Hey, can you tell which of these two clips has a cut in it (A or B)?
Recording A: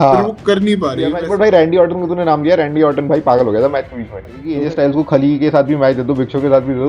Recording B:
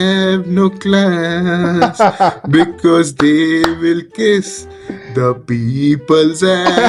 A